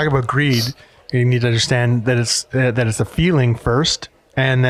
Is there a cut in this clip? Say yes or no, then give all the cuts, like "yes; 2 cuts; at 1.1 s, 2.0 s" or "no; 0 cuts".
no; 0 cuts